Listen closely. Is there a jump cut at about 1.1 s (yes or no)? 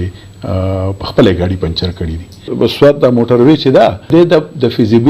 no